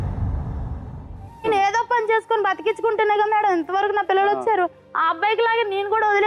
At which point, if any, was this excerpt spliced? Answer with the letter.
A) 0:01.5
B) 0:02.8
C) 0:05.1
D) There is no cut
A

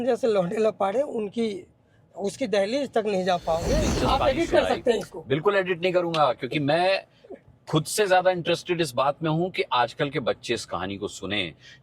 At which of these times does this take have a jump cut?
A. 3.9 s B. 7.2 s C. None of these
A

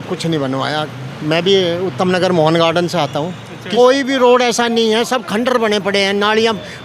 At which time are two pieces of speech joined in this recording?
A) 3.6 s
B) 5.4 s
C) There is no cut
A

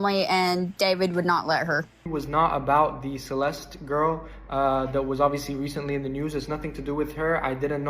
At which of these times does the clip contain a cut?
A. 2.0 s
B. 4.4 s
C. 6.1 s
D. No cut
A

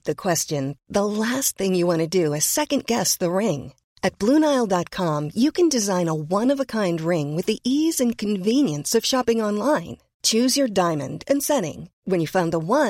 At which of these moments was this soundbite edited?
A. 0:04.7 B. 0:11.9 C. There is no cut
C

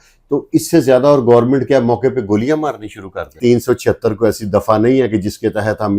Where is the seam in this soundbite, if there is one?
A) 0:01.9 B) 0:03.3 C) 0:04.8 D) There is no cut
B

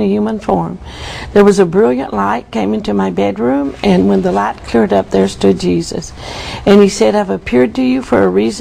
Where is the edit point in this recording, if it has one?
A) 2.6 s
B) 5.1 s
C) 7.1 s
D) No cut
C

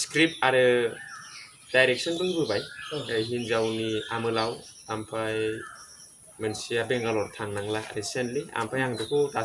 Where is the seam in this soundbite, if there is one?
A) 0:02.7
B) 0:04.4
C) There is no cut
C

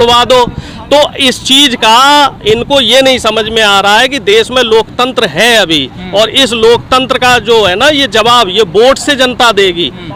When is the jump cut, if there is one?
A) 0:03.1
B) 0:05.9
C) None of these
C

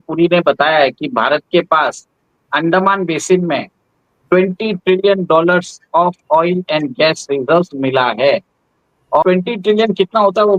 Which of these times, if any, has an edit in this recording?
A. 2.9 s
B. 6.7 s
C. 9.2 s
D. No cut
C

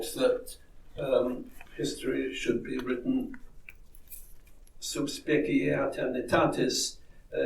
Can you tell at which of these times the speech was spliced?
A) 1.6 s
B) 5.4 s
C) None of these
A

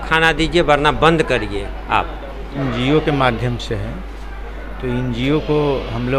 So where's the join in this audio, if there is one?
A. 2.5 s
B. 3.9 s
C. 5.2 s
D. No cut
A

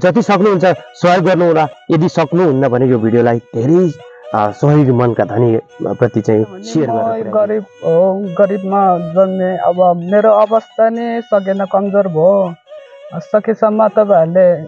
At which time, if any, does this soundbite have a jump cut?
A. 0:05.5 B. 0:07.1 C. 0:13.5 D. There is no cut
B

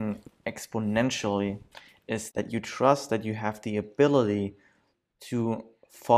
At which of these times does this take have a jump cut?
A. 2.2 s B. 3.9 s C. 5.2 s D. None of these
A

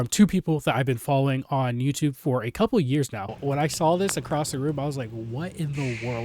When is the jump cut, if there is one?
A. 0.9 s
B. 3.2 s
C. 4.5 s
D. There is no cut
B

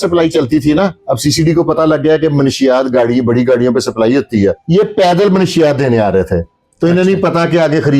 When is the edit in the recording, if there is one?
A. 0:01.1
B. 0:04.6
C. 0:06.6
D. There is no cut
B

